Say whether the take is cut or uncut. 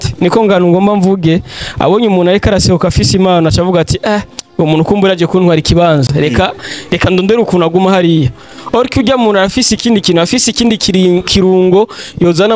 uncut